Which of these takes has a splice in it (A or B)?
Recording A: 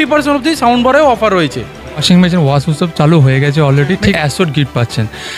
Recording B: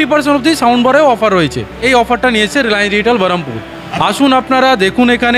A